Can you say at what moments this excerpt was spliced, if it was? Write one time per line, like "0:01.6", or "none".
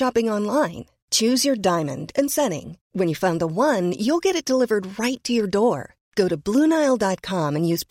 none